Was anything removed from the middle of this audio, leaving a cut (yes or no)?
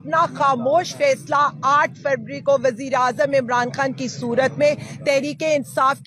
no